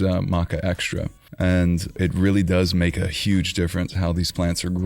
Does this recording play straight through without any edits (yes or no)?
no